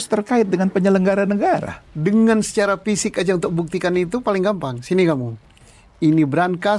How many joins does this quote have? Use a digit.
1